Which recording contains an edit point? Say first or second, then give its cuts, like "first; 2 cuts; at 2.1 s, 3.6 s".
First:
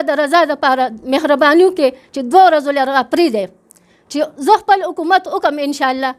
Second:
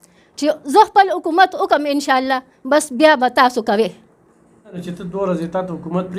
second; 1 cut; at 4.9 s